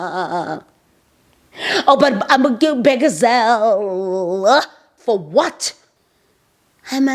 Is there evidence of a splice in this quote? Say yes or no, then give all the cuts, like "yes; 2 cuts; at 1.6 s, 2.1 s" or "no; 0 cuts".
yes; 1 cut; at 5.7 s